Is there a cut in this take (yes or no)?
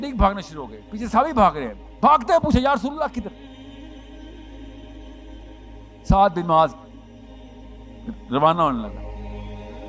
yes